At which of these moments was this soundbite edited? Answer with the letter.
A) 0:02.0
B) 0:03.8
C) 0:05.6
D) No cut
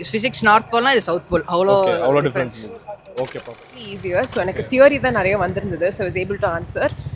B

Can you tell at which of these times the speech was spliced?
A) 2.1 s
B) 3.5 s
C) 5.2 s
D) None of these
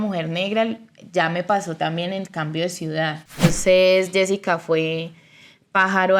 B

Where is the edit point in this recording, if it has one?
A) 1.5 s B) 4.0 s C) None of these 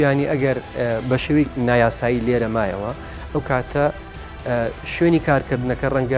A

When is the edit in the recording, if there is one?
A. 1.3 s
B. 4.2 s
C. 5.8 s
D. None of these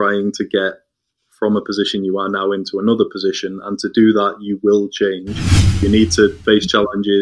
C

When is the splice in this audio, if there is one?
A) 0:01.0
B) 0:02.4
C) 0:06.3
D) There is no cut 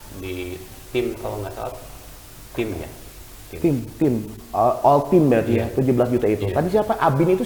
D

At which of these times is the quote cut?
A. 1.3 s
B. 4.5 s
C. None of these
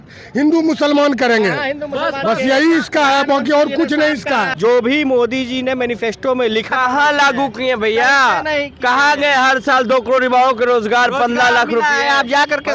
B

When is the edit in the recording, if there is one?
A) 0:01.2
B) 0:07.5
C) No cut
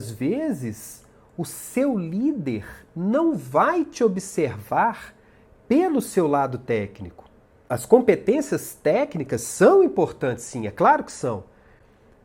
B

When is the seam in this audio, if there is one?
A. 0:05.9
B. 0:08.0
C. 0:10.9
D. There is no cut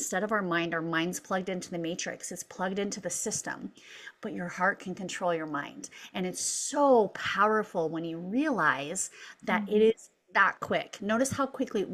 D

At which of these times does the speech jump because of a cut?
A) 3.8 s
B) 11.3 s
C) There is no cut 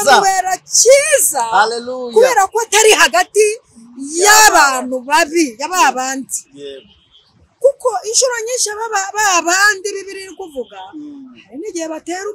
C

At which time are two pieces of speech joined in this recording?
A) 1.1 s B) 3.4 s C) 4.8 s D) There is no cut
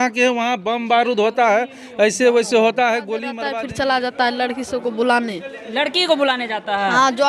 B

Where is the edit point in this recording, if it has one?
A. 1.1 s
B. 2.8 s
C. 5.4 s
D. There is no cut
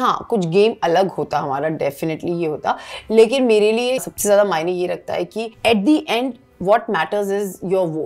C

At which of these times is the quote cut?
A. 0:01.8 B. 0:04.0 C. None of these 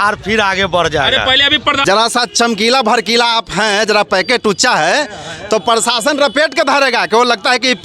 A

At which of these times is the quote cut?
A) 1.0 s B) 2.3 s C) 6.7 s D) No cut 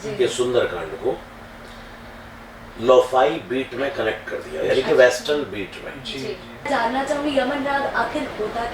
C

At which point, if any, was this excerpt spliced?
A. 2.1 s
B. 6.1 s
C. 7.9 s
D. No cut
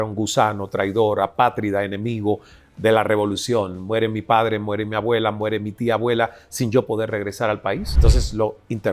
C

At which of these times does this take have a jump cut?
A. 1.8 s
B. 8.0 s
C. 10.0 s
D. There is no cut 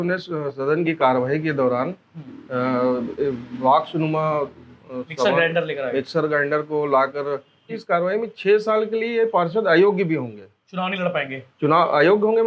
B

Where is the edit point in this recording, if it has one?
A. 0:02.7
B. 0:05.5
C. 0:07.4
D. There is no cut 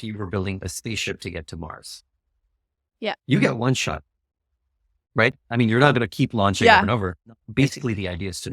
C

